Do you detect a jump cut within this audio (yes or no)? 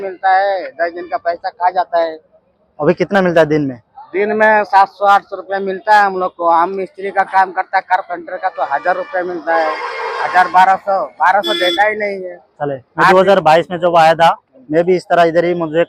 no